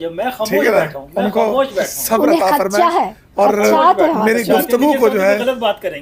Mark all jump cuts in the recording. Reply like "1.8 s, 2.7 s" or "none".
none

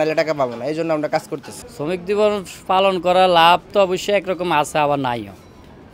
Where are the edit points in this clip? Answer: 1.8 s

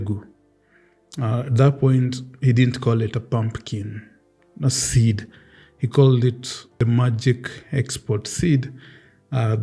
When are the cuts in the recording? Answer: 6.7 s

